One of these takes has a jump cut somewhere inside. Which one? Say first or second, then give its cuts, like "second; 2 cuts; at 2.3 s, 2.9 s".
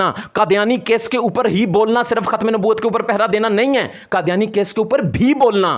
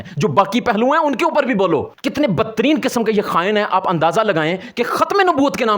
second; 1 cut; at 2.0 s